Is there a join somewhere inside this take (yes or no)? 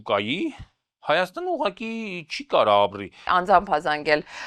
yes